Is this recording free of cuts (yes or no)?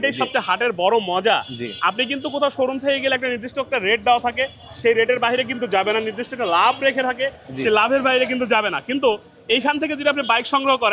yes